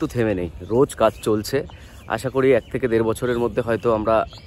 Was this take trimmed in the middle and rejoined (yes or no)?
no